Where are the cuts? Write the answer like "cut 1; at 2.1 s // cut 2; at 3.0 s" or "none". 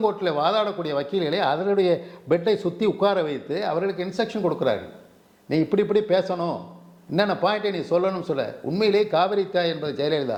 none